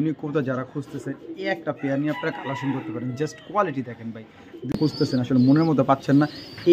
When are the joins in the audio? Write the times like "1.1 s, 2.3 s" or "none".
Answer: 4.8 s